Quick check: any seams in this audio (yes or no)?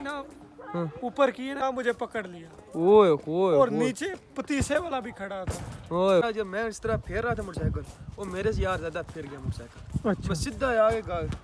yes